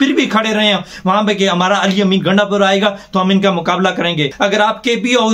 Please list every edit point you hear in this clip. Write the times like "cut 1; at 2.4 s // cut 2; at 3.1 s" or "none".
cut 1; at 4.3 s